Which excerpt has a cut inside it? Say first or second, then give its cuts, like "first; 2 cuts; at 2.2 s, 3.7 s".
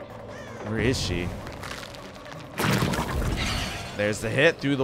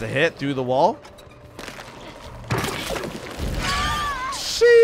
second; 1 cut; at 1.6 s